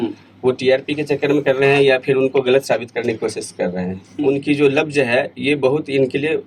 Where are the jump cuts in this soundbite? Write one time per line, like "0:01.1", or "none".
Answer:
0:04.1